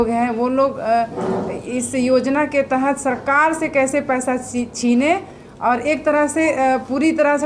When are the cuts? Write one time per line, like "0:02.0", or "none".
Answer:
none